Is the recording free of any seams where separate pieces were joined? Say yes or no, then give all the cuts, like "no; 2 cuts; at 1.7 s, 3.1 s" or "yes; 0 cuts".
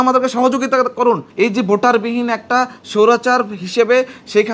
no; 1 cut; at 1.3 s